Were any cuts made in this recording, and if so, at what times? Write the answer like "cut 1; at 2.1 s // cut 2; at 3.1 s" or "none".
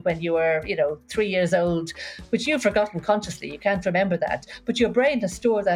none